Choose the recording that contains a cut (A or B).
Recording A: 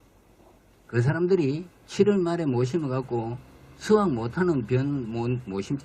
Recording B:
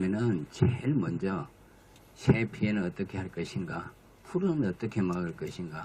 A